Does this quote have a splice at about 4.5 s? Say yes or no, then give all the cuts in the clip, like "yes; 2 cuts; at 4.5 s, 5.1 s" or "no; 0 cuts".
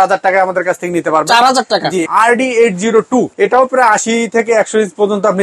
no; 2 cuts; at 2.1 s, 3.3 s